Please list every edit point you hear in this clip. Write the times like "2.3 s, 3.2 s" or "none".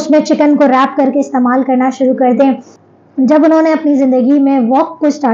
2.7 s